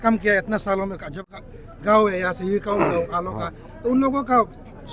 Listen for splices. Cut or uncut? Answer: cut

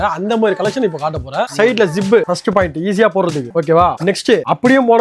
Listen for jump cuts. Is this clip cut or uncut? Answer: cut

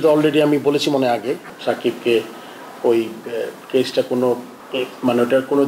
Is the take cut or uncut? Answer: cut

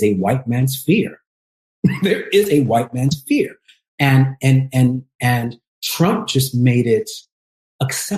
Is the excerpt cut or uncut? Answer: uncut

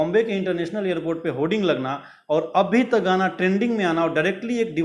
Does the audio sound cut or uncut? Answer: uncut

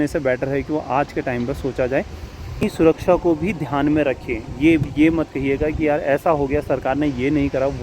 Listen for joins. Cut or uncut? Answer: cut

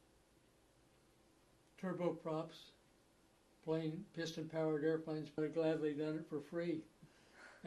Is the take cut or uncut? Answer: uncut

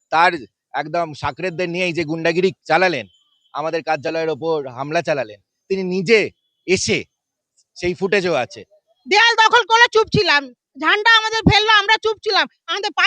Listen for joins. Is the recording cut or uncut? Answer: cut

